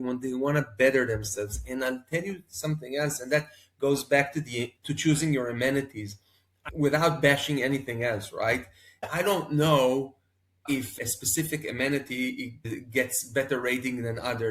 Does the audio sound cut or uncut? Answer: cut